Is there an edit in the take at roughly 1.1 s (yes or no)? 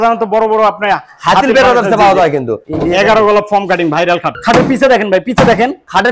no